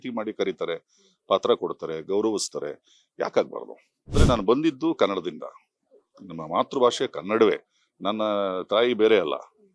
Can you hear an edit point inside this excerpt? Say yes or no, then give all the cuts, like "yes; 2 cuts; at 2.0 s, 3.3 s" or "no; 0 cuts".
yes; 1 cut; at 4.2 s